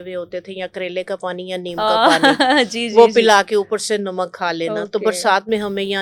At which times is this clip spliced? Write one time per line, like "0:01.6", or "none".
none